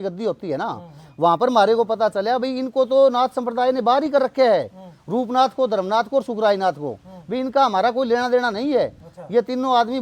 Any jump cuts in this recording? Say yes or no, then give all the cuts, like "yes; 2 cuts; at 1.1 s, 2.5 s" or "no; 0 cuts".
no; 0 cuts